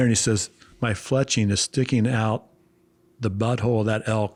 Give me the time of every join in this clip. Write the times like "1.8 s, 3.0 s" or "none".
none